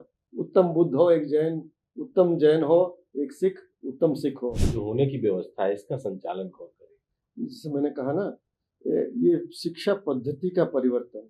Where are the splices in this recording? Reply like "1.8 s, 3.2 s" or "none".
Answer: 4.7 s

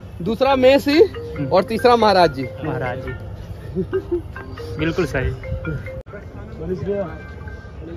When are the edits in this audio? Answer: none

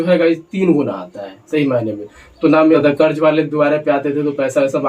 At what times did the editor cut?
2.8 s

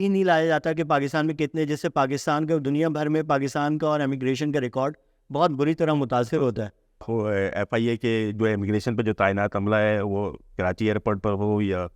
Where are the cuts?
7.0 s

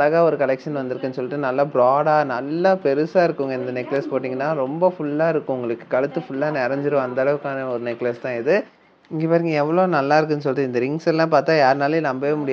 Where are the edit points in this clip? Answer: 8.8 s

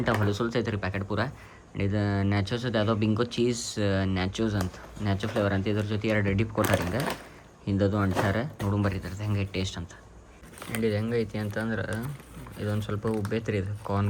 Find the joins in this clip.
none

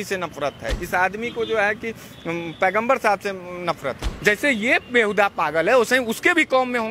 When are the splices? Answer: 4.1 s

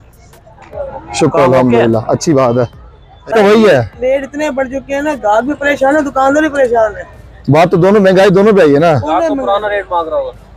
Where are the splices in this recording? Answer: 3.3 s

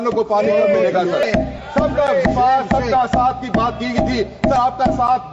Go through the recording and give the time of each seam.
1.2 s

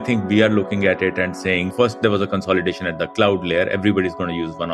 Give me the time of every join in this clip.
1.7 s

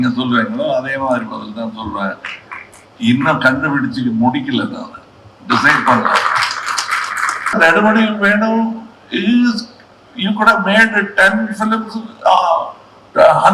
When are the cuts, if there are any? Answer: 7.5 s

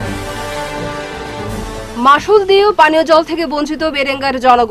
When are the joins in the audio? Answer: 1.4 s

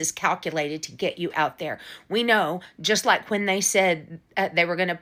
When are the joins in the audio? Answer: none

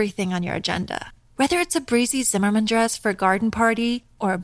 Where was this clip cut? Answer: none

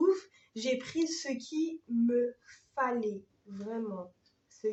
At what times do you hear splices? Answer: none

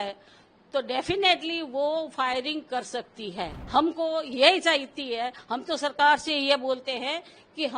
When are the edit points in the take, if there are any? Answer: 3.6 s

